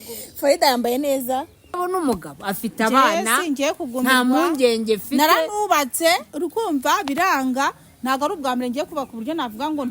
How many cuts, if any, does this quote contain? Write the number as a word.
one